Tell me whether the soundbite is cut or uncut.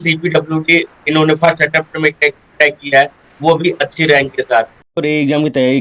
cut